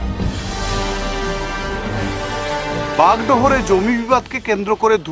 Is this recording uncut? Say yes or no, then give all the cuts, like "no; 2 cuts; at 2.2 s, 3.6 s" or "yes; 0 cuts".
no; 1 cut; at 2.8 s